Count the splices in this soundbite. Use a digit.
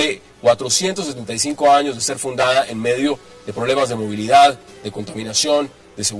1